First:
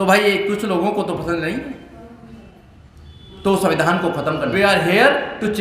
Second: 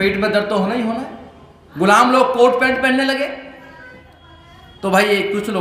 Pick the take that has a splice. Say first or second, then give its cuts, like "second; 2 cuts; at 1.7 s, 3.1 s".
first; 1 cut; at 4.5 s